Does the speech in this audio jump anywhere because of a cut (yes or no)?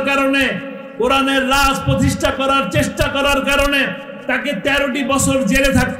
no